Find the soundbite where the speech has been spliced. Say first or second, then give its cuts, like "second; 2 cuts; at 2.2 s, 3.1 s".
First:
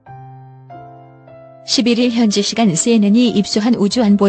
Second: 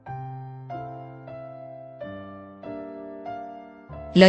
first; 1 cut; at 1.7 s